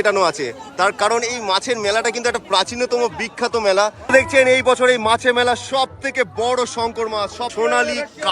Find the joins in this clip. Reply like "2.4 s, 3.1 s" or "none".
4.0 s, 7.5 s